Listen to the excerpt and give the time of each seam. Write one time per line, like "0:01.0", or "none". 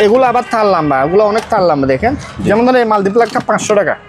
none